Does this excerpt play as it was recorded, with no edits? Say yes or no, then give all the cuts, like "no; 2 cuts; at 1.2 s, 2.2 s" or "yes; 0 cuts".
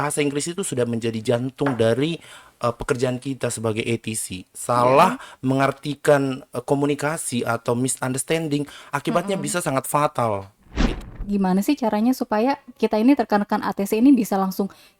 no; 1 cut; at 11.1 s